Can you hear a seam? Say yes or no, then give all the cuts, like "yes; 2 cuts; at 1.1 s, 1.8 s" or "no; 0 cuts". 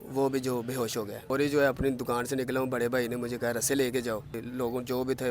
yes; 2 cuts; at 1.2 s, 4.4 s